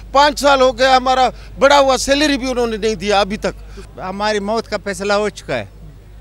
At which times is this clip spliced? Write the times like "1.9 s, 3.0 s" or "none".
3.9 s